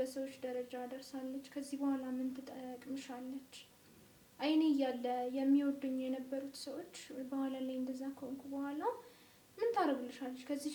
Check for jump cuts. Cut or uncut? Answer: uncut